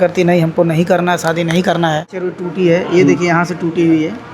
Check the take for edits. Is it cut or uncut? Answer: cut